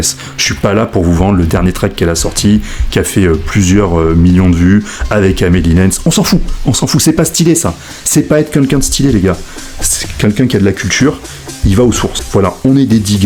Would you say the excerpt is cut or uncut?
cut